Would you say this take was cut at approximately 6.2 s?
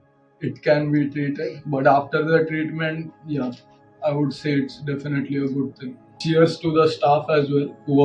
yes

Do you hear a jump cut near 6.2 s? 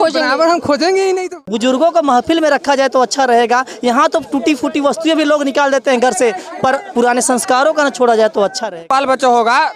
no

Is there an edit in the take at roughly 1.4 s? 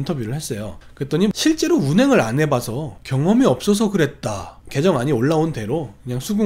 yes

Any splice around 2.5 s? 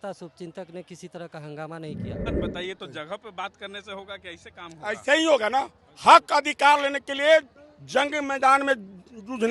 yes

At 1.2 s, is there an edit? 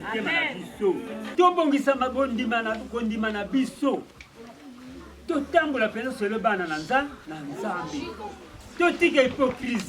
yes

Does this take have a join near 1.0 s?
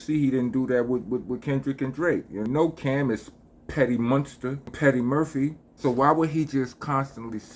no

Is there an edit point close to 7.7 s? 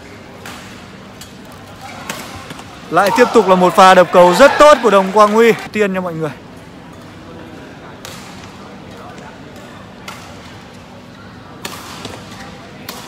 no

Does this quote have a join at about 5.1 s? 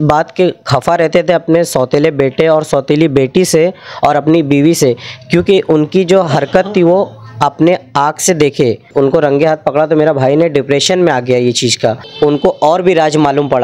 no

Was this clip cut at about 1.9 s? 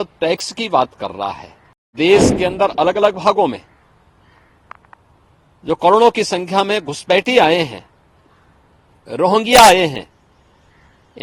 yes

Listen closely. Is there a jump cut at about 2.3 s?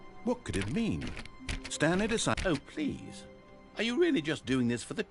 yes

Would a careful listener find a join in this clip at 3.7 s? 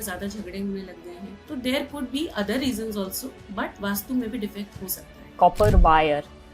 yes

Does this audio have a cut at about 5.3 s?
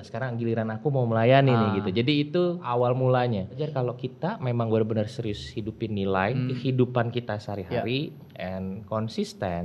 no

